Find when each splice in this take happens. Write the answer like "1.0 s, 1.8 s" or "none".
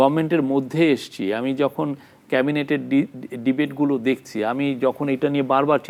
none